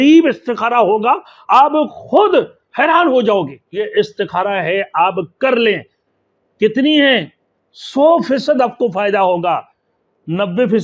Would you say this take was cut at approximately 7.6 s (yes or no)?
no